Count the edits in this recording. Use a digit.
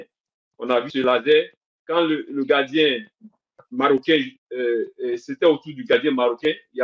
1